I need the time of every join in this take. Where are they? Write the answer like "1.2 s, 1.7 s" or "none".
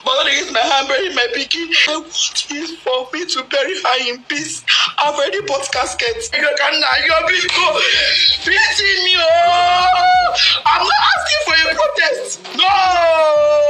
1.9 s, 6.3 s